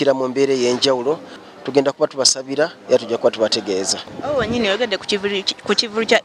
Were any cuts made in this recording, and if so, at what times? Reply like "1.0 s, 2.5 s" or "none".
1.3 s, 4.1 s

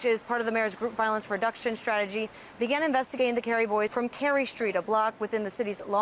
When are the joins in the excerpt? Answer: 3.9 s

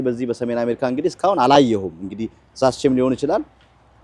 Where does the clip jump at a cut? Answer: none

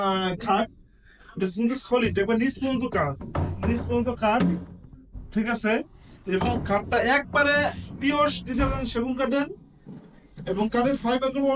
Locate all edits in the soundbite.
none

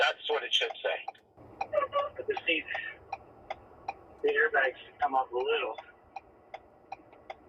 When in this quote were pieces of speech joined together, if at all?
1.4 s

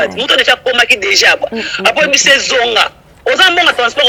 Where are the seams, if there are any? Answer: none

